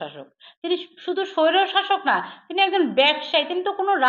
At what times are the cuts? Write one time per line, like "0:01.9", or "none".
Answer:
none

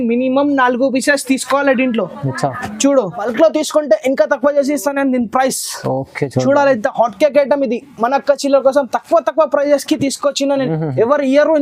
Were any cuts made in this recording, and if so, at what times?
0:03.2

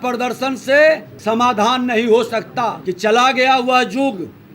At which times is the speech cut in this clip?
0:01.1
0:02.8

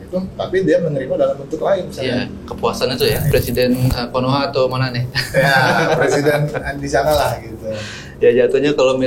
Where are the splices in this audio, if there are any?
0:03.2

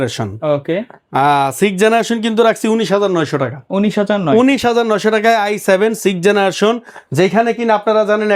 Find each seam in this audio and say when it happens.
none

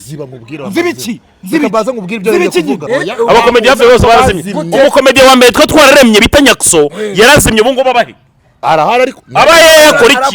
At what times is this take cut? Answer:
0:02.9

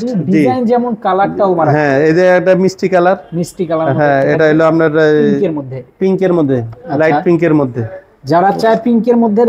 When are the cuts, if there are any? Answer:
none

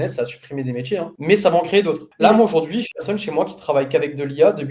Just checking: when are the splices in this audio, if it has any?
none

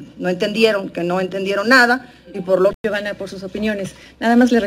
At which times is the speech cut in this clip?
0:02.7

